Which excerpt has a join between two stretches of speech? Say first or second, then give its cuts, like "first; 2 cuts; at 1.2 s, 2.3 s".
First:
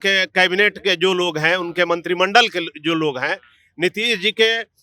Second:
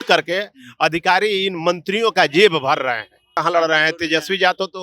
second; 1 cut; at 3.3 s